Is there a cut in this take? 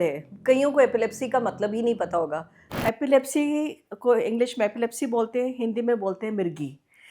yes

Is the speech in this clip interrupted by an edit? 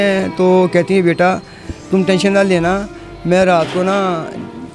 no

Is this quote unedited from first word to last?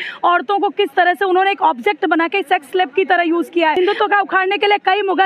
no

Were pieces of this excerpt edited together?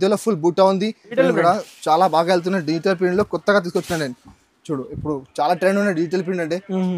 yes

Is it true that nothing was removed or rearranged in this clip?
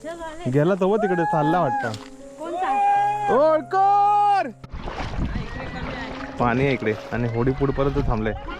no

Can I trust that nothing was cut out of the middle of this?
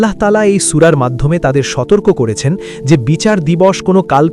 yes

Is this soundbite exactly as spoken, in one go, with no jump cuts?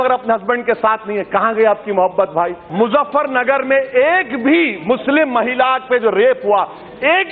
no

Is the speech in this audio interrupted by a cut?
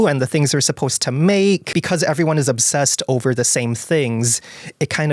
yes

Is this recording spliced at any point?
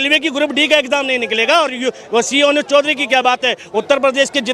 yes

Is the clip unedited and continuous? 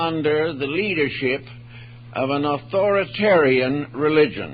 yes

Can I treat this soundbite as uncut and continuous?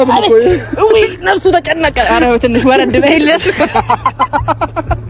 yes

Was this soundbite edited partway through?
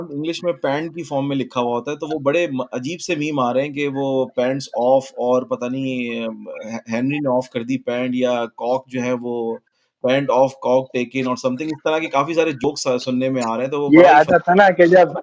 no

